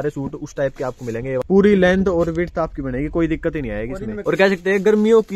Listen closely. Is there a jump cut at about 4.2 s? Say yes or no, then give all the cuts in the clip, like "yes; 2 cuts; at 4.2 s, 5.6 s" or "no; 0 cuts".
yes; 2 cuts; at 1.4 s, 4.2 s